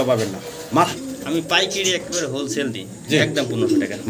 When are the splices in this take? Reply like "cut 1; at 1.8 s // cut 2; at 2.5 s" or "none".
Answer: cut 1; at 1.0 s